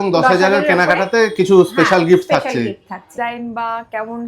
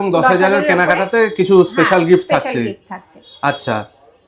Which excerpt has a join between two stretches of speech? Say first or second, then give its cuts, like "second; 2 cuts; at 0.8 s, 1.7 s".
first; 1 cut; at 3.1 s